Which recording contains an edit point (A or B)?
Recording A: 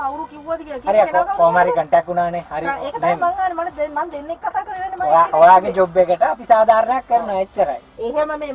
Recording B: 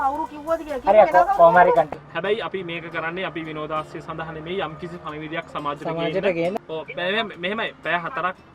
B